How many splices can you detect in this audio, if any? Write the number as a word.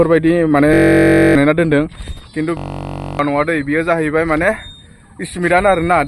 zero